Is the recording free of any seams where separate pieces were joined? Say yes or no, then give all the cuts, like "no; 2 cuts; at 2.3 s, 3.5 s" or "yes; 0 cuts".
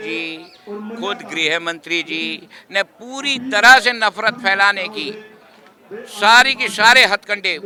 yes; 0 cuts